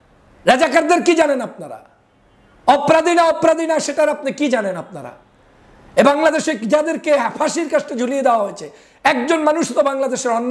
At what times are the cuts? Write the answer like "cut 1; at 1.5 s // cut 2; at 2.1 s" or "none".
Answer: none